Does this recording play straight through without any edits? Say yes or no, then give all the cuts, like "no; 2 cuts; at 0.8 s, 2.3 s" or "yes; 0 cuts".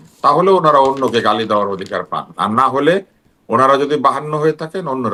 yes; 0 cuts